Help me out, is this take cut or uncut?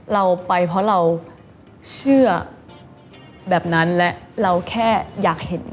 uncut